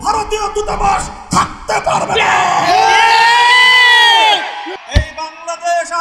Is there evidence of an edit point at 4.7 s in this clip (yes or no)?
yes